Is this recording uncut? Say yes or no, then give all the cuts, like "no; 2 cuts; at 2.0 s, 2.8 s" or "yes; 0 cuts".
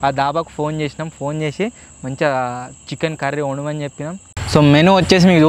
no; 1 cut; at 4.3 s